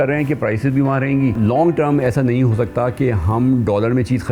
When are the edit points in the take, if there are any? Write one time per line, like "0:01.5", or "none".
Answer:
0:01.4